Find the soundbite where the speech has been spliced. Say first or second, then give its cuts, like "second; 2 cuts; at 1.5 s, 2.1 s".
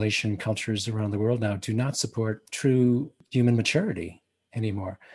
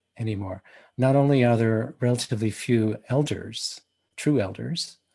first; 2 cuts; at 2.5 s, 3.2 s